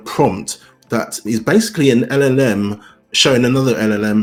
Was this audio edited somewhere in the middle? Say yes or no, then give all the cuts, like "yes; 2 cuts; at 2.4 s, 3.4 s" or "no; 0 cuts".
no; 0 cuts